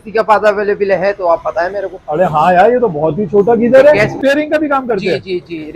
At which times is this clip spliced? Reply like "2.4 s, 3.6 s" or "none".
4.2 s